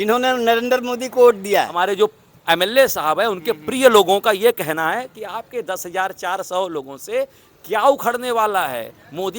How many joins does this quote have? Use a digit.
1